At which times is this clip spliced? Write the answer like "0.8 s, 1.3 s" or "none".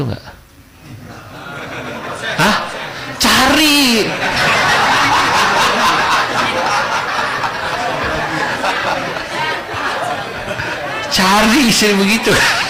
none